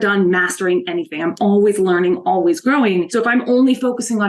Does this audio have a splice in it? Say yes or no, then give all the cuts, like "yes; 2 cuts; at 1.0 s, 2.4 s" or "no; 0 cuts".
yes; 1 cut; at 3.1 s